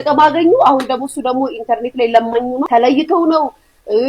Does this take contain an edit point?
yes; 1 cut; at 2.7 s

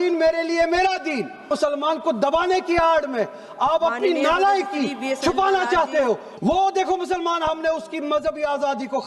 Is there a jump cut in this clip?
yes; 2 cuts; at 1.5 s, 6.3 s

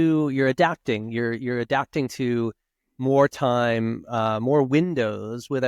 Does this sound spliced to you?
no; 0 cuts

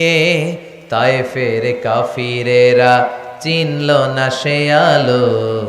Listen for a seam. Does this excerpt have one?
no; 0 cuts

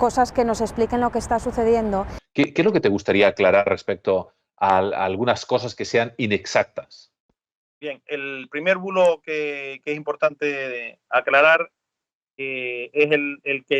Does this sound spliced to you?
yes; 1 cut; at 2.4 s

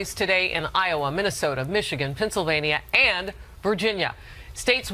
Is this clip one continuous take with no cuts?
no; 1 cut; at 3.1 s

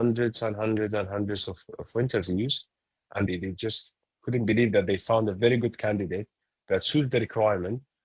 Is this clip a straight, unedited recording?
no; 1 cut; at 3.3 s

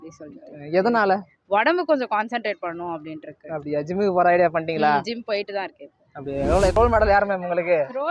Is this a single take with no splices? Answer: no; 1 cut; at 6.8 s

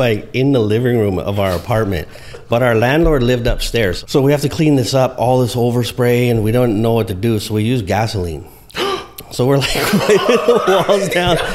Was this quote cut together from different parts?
yes; 1 cut; at 4.0 s

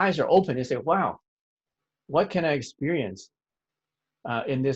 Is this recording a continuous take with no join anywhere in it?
yes; 0 cuts

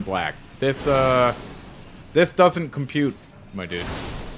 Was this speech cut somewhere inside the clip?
no; 0 cuts

